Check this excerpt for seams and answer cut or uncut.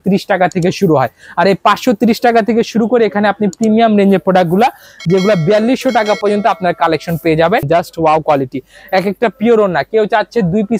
cut